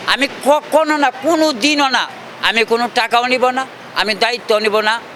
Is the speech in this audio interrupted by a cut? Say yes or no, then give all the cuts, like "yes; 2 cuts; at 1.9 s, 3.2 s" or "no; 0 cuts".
no; 0 cuts